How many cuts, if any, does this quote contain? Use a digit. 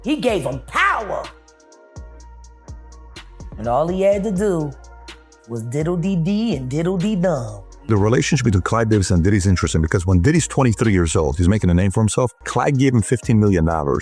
3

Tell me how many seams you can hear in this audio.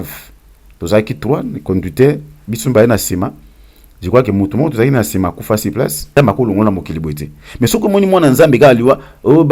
1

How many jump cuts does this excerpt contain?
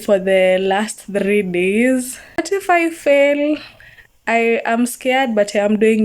1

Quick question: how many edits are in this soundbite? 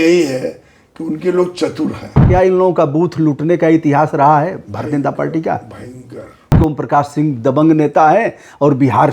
2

